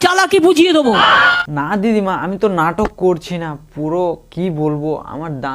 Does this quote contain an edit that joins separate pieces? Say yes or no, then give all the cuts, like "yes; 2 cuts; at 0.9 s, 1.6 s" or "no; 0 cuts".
yes; 1 cut; at 1.4 s